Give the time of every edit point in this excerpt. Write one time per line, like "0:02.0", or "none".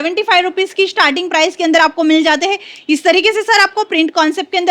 none